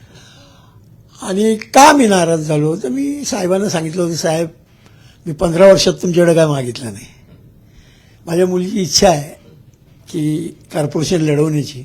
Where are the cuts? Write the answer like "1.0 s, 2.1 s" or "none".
none